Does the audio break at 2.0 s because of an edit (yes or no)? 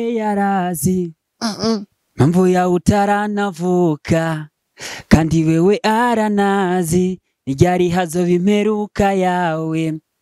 no